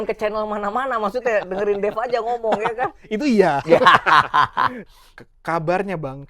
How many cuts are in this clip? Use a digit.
1